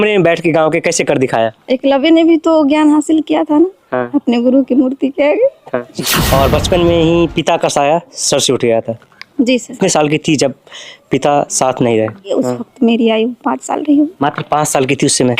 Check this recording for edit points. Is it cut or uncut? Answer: cut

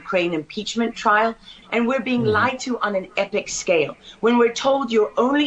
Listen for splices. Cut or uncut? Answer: cut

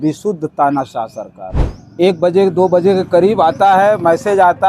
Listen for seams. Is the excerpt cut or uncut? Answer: cut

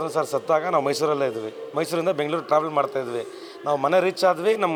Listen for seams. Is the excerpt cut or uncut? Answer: uncut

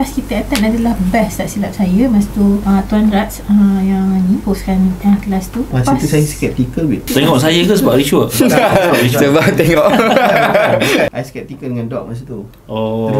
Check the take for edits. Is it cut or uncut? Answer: cut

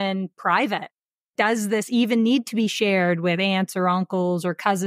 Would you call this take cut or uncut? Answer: cut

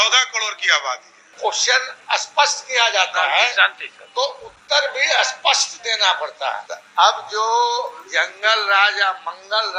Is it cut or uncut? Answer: cut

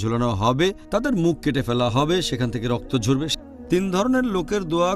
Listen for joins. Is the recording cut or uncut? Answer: cut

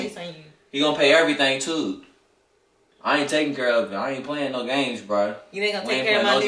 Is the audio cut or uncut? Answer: uncut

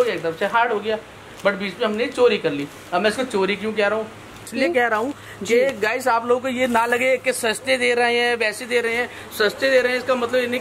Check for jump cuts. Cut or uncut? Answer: cut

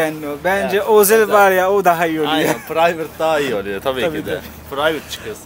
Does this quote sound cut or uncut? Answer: uncut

